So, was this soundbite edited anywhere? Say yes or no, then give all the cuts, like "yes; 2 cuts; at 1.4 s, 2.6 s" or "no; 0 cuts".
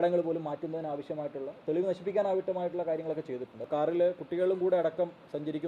yes; 1 cut; at 3.7 s